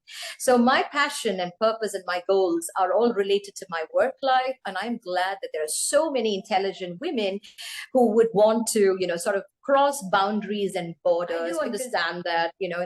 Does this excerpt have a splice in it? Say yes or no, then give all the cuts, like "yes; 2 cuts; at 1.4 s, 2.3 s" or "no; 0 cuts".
yes; 1 cut; at 11.7 s